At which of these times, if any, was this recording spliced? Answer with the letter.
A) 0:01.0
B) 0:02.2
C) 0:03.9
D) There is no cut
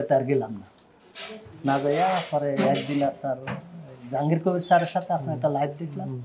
D